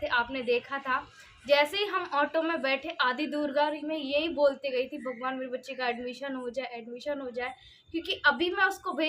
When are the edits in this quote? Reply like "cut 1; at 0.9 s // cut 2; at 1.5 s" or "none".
none